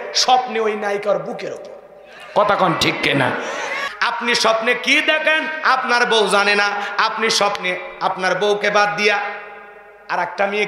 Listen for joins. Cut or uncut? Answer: cut